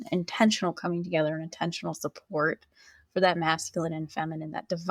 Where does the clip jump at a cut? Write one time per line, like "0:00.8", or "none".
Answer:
none